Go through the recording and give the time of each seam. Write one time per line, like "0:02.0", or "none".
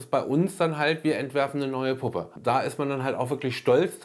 0:02.3